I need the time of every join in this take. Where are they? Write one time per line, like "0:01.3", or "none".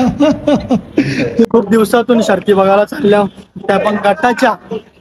0:01.4